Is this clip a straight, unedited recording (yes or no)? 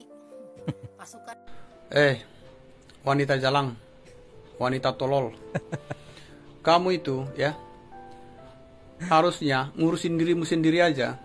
yes